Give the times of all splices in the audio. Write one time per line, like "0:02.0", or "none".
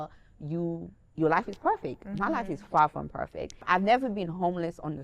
0:03.6